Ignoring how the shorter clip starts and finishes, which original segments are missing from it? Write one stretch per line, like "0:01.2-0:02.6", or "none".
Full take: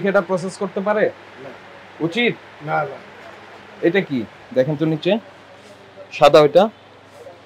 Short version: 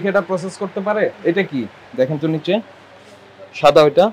0:01.2-0:03.7